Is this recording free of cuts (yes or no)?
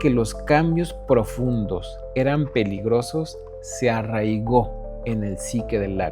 yes